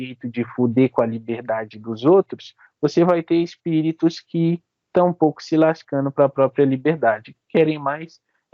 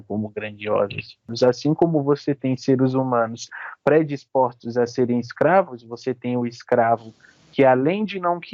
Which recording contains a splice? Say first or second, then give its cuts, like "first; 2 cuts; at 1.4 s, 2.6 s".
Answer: second; 1 cut; at 1.3 s